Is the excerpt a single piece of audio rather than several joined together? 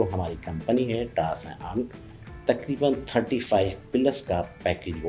yes; 0 cuts

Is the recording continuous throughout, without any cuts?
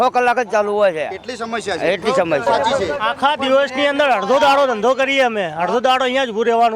no; 1 cut; at 2.5 s

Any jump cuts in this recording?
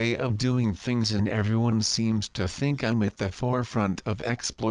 yes; 1 cut; at 3.8 s

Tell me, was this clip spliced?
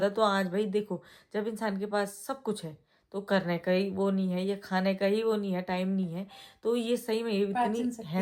no; 0 cuts

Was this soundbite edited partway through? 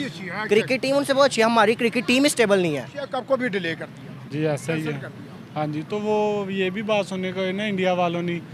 yes; 1 cut; at 3.2 s

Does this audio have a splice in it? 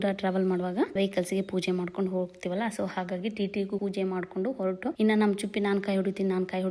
yes; 3 cuts; at 0.9 s, 3.8 s, 4.9 s

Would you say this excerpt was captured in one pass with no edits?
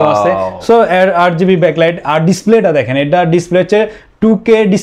yes; 0 cuts

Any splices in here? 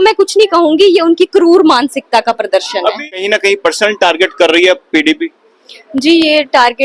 yes; 1 cut; at 3.2 s

